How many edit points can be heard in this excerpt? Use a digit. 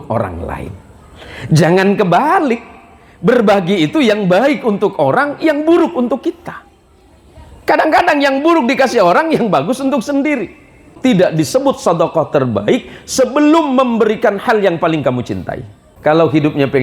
2